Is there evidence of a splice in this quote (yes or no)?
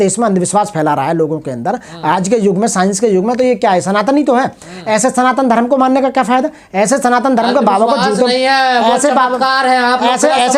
no